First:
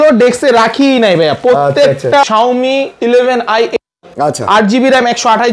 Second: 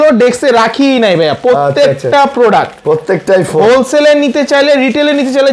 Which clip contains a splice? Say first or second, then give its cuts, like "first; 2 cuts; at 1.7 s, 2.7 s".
first; 1 cut; at 2.3 s